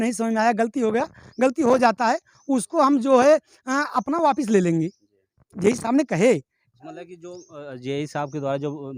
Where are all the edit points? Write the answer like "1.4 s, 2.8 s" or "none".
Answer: none